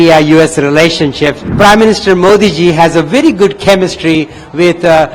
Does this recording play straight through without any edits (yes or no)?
no